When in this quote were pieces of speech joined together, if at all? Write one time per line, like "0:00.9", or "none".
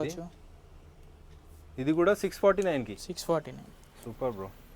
none